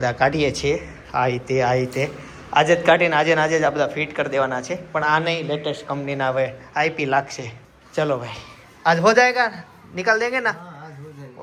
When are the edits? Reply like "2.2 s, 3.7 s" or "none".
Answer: none

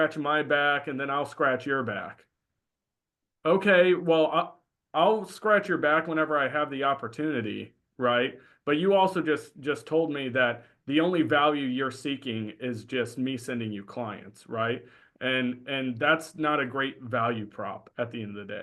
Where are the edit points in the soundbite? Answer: none

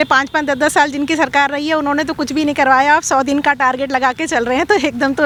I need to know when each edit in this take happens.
none

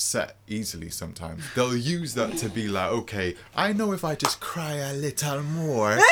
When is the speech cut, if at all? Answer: 1.4 s

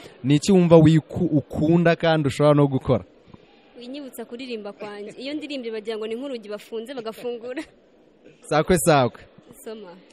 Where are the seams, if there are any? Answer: 8.3 s

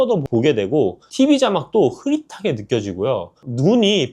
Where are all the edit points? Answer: 1.0 s

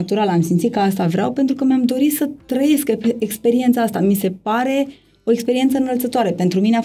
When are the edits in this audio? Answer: none

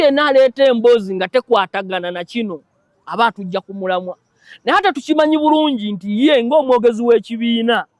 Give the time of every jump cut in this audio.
none

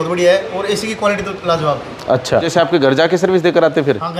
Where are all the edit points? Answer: none

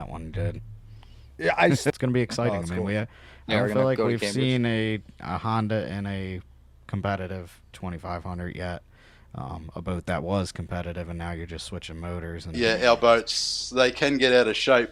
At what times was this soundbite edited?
1.9 s, 12.5 s

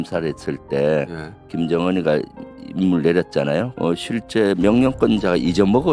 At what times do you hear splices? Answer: 3.7 s

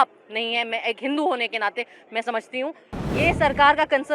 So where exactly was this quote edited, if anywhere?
2.9 s

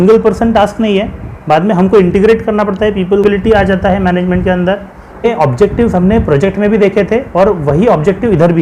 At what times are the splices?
3.2 s, 5.2 s

